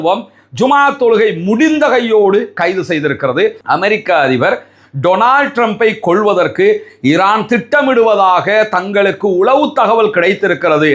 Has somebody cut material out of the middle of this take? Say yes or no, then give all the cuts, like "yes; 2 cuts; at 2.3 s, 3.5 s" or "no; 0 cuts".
yes; 1 cut; at 3.6 s